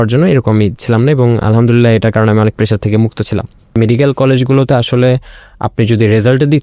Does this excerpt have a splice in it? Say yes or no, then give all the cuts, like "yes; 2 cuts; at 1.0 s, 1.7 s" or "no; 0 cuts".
yes; 1 cut; at 3.8 s